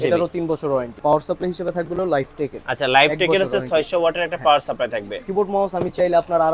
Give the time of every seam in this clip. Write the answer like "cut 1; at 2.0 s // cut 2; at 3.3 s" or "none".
cut 1; at 1.0 s // cut 2; at 5.2 s